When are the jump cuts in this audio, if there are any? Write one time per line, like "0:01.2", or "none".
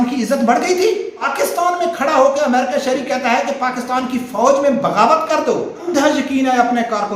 0:01.2
0:05.8